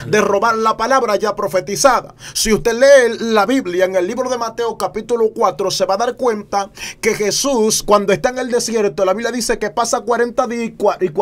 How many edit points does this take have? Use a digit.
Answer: 0